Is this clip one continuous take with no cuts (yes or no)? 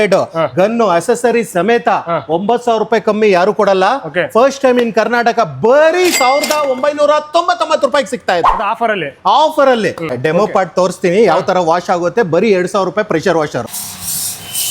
no